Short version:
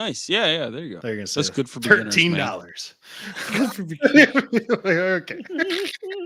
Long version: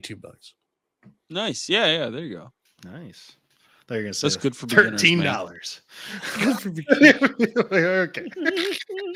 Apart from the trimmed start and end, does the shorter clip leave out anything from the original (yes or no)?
yes